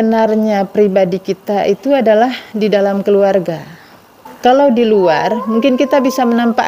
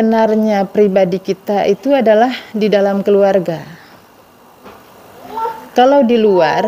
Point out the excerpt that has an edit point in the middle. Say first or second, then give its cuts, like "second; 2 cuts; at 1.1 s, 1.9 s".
first; 1 cut; at 4.3 s